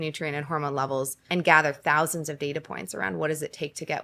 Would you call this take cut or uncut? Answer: cut